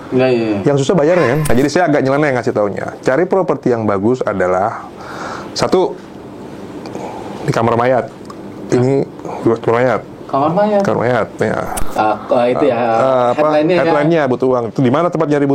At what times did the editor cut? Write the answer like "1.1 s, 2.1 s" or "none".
1.4 s, 11.7 s